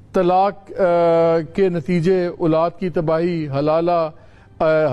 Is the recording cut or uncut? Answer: uncut